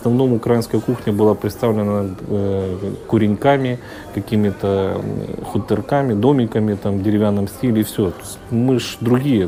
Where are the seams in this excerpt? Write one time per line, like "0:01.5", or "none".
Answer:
none